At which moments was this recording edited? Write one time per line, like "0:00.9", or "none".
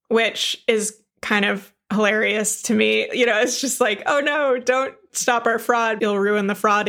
0:06.0